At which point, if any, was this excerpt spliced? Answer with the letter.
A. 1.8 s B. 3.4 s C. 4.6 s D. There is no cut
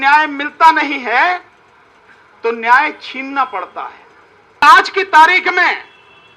C